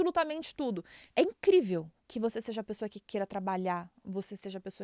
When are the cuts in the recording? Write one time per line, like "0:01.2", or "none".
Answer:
0:00.9